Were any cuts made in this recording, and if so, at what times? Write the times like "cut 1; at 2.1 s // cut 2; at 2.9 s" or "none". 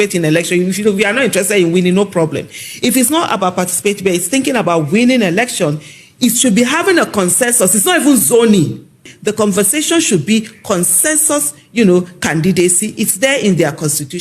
cut 1; at 9.2 s